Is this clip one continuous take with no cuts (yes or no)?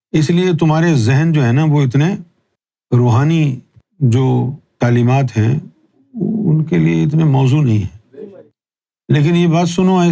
no